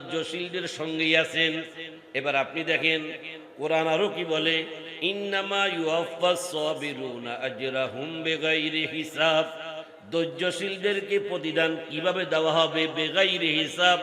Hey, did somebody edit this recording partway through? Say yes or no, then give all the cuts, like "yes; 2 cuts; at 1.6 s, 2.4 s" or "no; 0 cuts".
no; 0 cuts